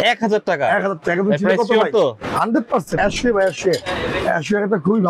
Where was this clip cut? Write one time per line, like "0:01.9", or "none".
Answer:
0:02.9